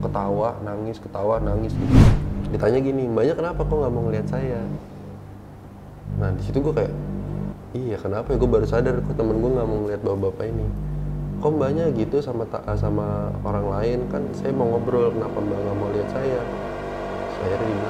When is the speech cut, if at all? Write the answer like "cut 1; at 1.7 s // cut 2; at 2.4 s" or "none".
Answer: cut 1; at 2.1 s